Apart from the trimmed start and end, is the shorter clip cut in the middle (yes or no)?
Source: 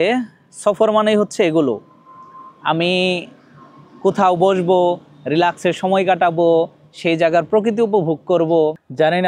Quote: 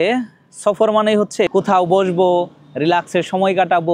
yes